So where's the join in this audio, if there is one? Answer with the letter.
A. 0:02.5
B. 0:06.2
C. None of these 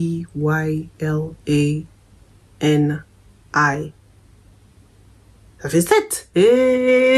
B